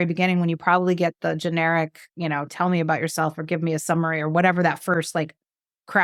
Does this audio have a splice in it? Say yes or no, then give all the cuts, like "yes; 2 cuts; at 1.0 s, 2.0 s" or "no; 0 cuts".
no; 0 cuts